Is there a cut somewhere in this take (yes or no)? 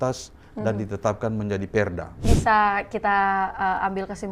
yes